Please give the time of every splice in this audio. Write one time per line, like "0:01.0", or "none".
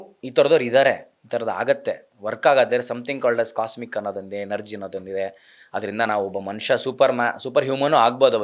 none